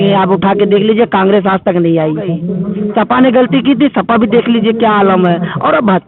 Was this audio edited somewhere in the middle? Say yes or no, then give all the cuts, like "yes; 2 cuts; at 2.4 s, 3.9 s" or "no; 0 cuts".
yes; 1 cut; at 2.5 s